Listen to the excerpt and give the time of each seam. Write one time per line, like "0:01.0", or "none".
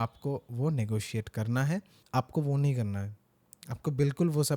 0:02.0